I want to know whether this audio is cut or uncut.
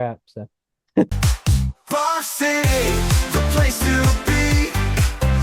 cut